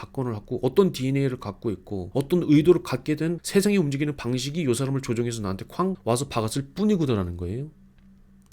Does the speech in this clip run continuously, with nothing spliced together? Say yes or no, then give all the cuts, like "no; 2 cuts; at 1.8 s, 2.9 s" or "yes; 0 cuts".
no; 2 cuts; at 1.9 s, 3.4 s